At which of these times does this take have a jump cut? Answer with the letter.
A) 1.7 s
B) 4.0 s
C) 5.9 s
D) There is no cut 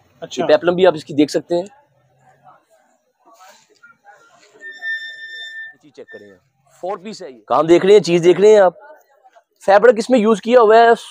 C